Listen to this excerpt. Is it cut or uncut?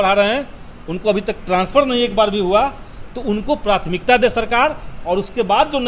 uncut